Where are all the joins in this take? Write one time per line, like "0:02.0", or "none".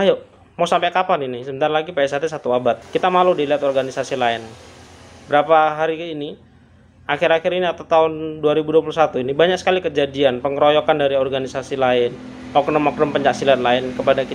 0:02.8